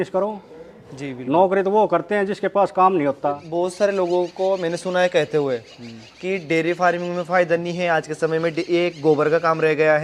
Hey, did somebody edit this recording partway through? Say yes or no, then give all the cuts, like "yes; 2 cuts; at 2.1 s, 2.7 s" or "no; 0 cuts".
yes; 1 cut; at 3.4 s